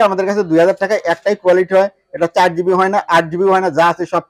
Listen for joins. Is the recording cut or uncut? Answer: uncut